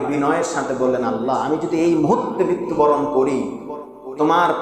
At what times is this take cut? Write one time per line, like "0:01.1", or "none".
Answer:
none